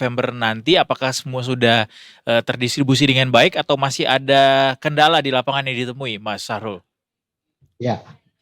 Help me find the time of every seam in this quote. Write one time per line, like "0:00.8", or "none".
none